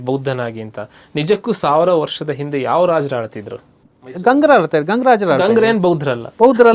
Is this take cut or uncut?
uncut